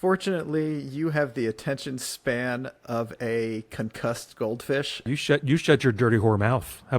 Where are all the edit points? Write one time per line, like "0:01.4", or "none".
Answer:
0:05.1